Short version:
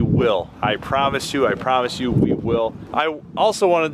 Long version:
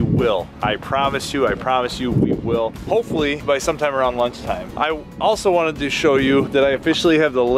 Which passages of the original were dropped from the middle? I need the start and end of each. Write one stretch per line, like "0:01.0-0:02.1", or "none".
0:02.8-0:04.6